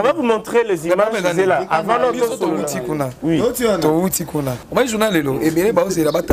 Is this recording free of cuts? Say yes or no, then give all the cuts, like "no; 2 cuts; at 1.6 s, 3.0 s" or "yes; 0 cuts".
no; 1 cut; at 4.6 s